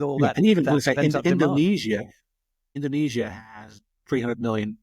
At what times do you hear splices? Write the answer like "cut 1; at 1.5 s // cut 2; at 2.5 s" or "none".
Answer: cut 1; at 2.6 s // cut 2; at 3.9 s